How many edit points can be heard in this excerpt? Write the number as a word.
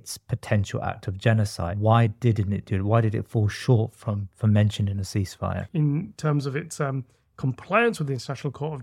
two